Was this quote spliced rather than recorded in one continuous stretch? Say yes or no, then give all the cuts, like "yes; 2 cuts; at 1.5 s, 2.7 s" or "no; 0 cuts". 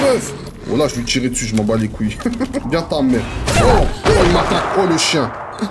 yes; 1 cut; at 2.6 s